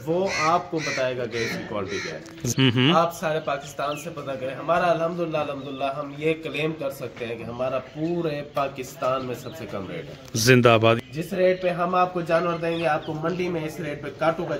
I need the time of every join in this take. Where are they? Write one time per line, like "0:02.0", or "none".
0:02.4
0:11.0